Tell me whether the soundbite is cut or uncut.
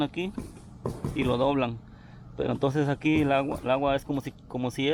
uncut